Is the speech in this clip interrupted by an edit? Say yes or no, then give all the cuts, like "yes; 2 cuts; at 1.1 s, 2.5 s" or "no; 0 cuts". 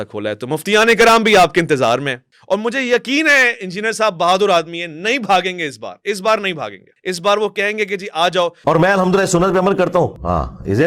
yes; 1 cut; at 8.6 s